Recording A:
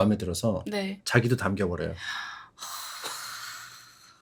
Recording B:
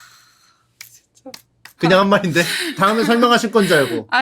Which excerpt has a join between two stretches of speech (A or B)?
B